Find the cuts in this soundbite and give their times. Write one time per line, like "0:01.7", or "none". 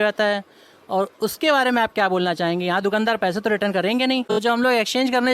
0:04.4